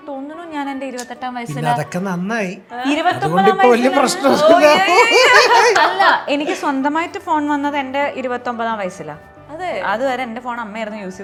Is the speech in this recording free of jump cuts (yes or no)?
yes